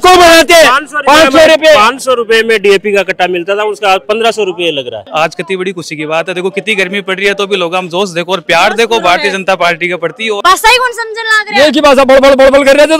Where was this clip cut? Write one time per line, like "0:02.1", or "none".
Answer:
0:05.0
0:10.4